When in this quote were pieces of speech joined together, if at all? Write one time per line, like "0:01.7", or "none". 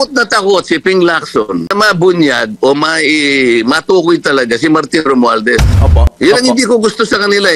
0:01.7
0:05.7